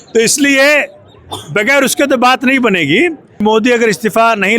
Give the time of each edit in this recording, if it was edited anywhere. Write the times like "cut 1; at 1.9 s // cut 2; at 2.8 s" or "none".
cut 1; at 3.4 s